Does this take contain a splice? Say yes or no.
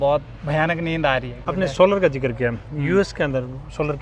yes